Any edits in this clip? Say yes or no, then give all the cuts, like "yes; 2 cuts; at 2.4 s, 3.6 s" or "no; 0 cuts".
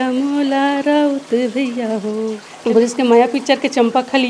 yes; 1 cut; at 2.7 s